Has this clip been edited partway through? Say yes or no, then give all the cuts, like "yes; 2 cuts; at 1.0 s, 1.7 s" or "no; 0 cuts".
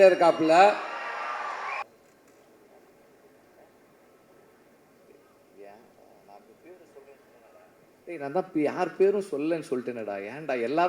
yes; 1 cut; at 1.8 s